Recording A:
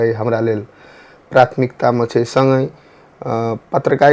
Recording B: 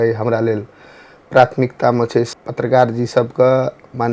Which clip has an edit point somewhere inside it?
B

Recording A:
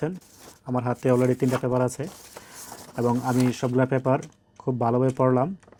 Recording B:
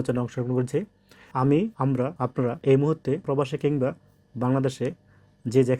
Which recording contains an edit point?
B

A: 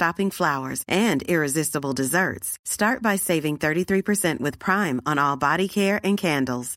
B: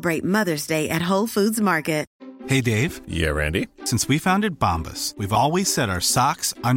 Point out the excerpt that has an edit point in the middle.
B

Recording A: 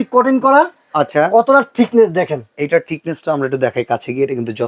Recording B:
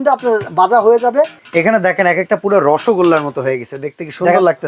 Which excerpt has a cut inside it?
B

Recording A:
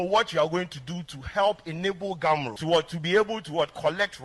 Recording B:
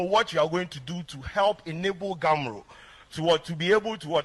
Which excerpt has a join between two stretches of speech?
A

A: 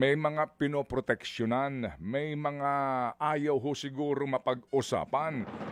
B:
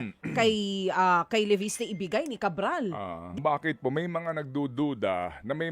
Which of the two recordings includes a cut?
B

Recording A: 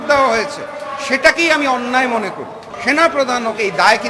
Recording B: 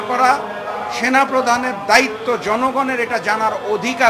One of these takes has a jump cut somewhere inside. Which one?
A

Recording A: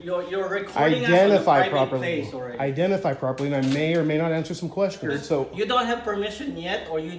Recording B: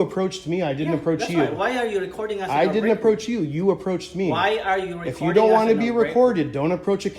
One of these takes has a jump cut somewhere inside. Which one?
A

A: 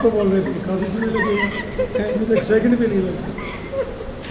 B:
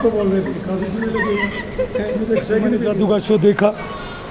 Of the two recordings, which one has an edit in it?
B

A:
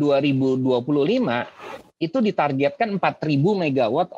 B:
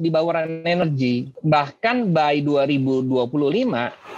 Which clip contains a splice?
B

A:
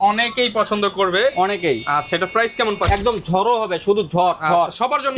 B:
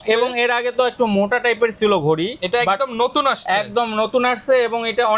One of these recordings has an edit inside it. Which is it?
A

